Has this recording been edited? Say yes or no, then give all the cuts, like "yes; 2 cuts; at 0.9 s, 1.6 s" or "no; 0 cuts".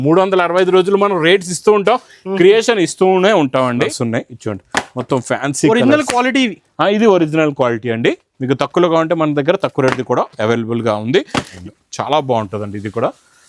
yes; 2 cuts; at 3.9 s, 11.6 s